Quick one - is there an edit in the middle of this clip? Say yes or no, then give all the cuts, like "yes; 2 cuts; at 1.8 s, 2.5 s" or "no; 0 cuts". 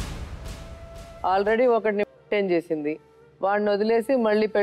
yes; 1 cut; at 1.1 s